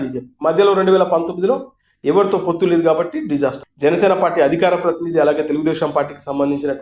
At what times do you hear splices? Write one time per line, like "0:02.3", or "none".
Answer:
0:03.6

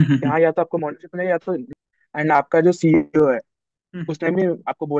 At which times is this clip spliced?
0:01.7

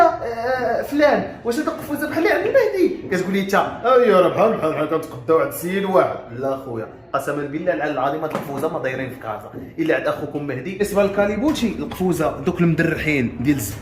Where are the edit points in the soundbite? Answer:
0:10.7

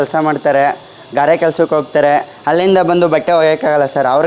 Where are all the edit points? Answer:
none

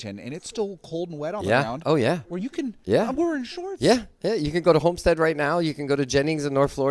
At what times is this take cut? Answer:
0:02.8

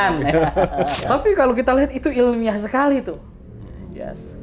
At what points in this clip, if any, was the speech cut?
0:01.0

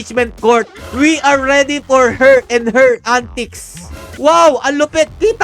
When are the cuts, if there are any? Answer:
0:04.1

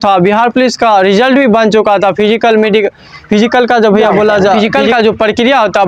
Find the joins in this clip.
0:04.6

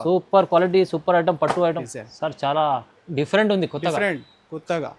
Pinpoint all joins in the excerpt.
0:01.8

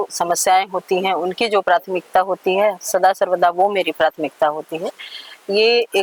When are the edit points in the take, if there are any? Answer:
none

